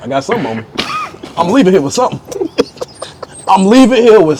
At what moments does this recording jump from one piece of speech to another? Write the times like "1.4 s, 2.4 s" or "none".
none